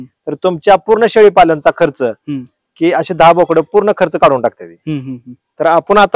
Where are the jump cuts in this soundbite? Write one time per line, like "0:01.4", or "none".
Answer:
none